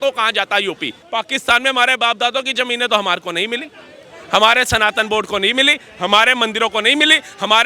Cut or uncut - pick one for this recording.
cut